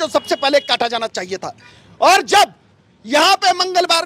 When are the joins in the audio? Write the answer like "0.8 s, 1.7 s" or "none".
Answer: none